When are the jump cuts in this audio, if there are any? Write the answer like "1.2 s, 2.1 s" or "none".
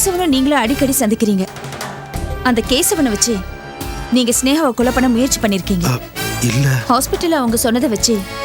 none